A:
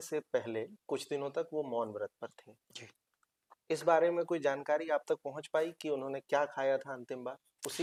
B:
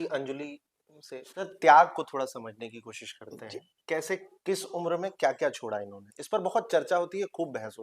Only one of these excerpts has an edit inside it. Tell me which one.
B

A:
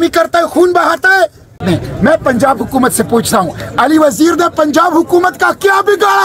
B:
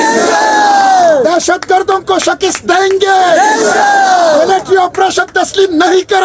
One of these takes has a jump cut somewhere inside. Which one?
A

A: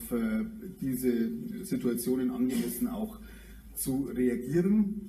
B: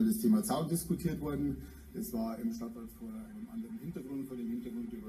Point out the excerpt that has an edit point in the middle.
A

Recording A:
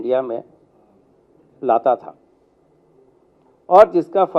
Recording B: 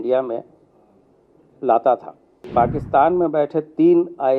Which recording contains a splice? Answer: B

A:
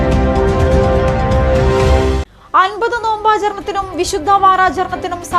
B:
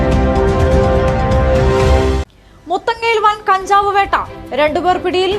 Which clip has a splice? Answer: B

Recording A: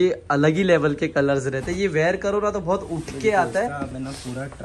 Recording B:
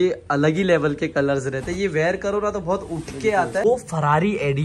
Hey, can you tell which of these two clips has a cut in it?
B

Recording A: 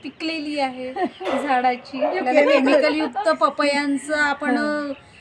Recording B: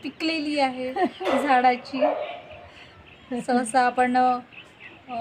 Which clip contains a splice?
A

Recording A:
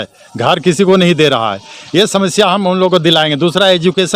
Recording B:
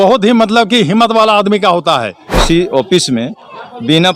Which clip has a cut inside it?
B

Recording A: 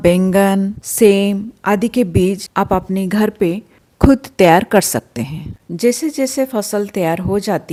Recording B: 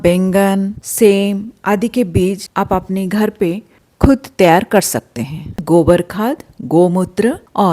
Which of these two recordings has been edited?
B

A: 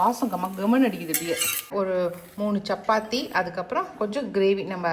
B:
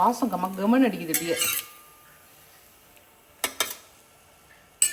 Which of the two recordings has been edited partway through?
A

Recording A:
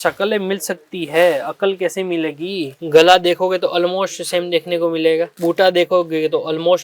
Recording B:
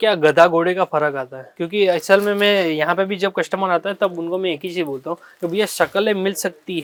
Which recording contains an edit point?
A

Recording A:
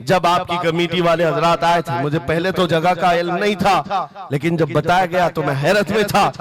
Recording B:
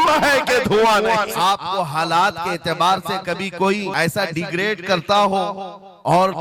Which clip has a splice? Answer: B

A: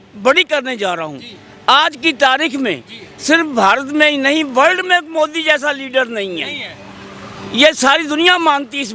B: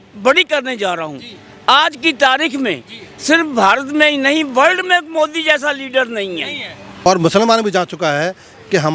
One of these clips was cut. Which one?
B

